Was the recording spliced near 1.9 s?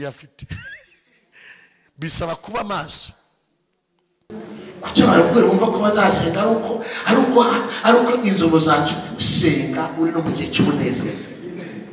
no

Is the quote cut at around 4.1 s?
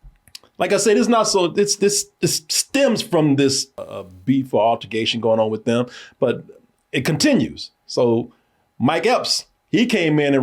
yes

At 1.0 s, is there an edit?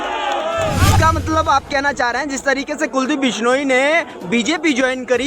yes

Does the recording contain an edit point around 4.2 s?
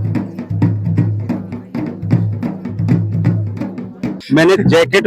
yes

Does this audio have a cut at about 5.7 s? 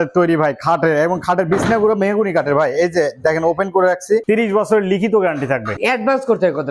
yes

